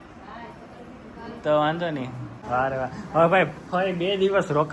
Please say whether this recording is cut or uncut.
cut